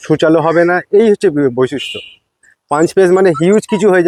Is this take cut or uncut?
uncut